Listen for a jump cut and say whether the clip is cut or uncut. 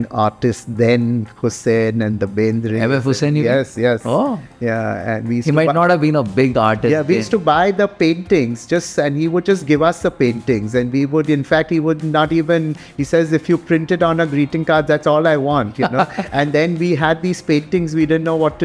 uncut